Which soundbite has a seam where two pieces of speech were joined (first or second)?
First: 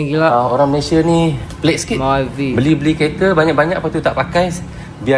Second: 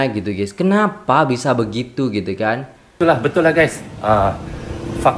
second